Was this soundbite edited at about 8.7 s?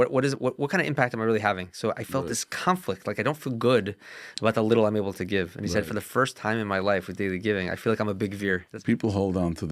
yes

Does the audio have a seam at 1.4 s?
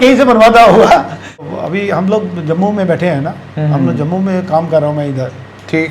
yes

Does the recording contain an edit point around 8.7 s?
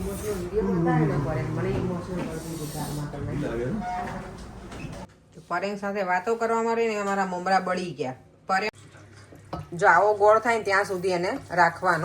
yes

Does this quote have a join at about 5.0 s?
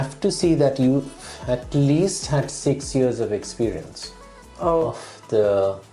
yes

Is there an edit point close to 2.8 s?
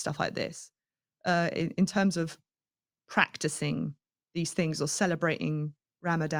no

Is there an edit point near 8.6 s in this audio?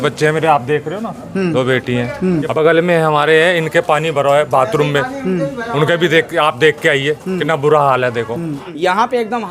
yes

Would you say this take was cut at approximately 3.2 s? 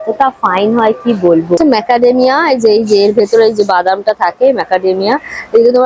no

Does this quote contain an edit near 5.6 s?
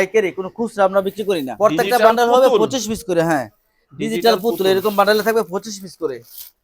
no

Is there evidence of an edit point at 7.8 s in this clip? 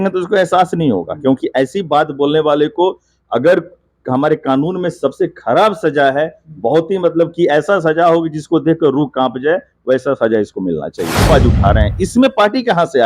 no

